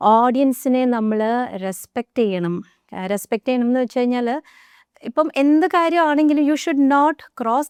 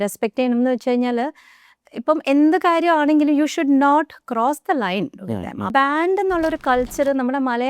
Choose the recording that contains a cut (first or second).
second